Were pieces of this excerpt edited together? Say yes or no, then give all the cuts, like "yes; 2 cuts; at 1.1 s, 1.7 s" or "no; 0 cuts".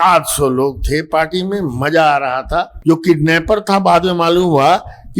yes; 1 cut; at 2.7 s